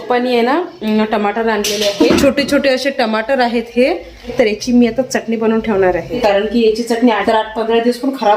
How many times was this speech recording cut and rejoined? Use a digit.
3